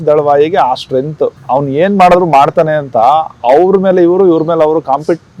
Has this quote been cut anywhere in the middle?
yes; 1 cut; at 1.4 s

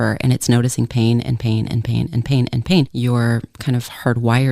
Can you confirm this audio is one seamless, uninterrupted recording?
no; 1 cut; at 2.9 s

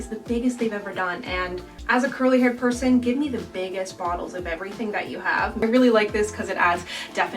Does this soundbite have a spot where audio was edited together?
yes; 2 cuts; at 1.7 s, 5.6 s

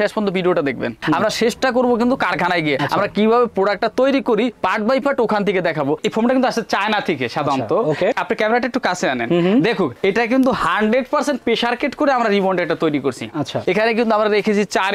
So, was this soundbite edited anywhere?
yes; 3 cuts; at 1.0 s, 6.0 s, 13.6 s

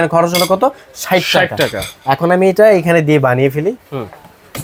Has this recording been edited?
no; 0 cuts

